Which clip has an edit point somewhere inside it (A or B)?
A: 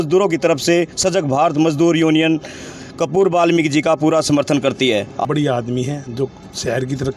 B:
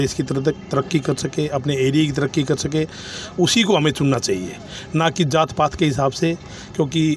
A